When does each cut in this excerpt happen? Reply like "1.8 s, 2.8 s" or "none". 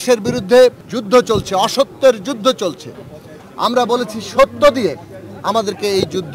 0.9 s